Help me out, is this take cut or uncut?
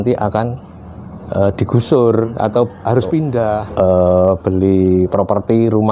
cut